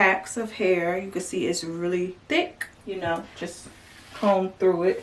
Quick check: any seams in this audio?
no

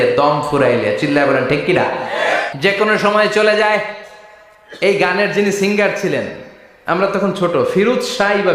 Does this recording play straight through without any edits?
no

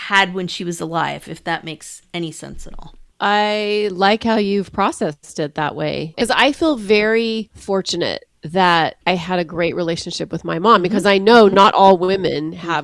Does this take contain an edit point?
yes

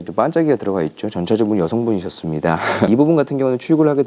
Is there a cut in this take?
yes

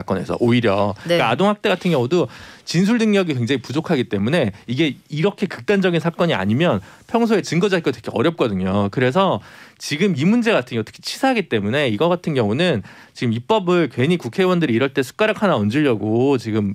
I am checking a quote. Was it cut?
no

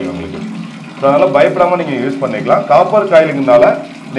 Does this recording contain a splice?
no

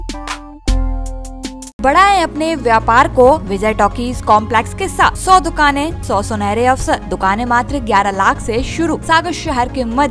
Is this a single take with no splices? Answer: no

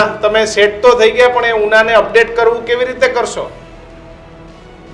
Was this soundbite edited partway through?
no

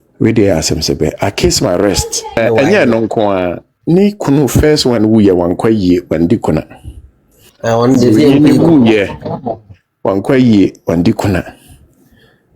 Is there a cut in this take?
yes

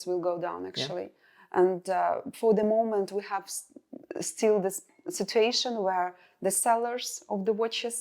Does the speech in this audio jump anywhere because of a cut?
no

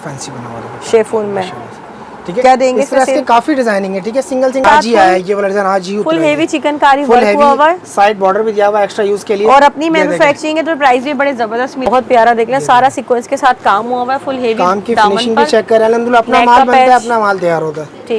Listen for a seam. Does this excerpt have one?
yes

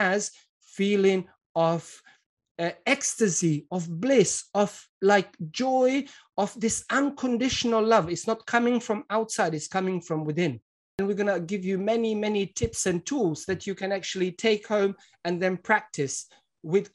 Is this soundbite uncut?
no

